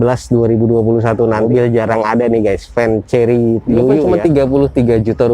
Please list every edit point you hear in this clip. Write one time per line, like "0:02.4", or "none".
0:01.4
0:04.0